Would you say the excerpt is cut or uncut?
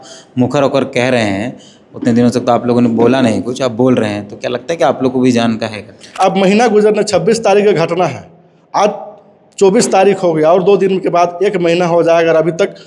cut